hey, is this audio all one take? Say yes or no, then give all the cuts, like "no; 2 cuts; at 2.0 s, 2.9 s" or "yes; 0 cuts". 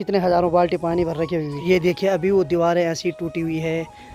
no; 1 cut; at 1.5 s